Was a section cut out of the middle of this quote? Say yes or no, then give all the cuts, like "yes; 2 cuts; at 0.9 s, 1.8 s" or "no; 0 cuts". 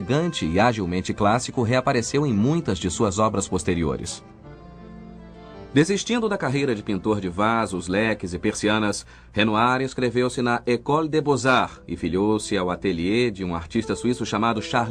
no; 0 cuts